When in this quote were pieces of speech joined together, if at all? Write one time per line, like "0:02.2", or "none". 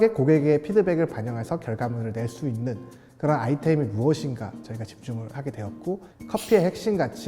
0:06.1